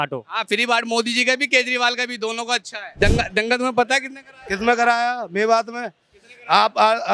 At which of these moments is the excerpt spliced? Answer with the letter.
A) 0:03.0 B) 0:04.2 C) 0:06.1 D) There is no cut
A